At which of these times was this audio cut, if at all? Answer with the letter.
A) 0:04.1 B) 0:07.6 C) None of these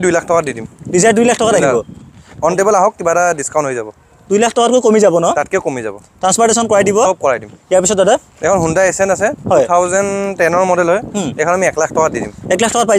B